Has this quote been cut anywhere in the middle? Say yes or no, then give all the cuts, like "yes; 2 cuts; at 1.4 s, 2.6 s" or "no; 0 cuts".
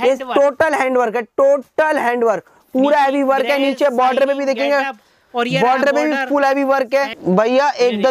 yes; 1 cut; at 7.1 s